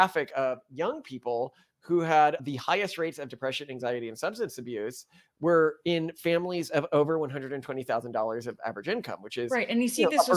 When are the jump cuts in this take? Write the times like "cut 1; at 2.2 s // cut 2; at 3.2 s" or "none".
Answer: none